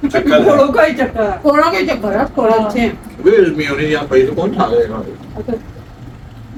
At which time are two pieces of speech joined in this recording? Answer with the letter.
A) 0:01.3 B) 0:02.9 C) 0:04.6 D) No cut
D